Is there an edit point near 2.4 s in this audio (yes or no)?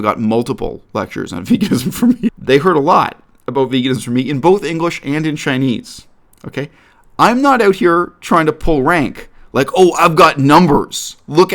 yes